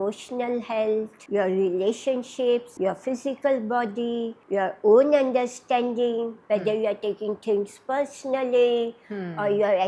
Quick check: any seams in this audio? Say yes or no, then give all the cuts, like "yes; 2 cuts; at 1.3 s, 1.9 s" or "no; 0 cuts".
yes; 4 cuts; at 1.2 s, 2.7 s, 4.4 s, 6.4 s